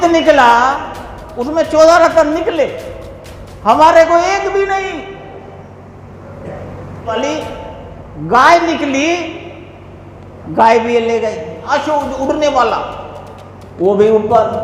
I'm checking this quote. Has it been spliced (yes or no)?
yes